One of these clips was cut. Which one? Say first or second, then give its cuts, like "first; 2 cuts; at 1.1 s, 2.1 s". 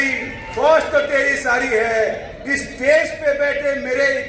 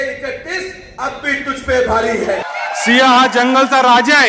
second; 1 cut; at 2.4 s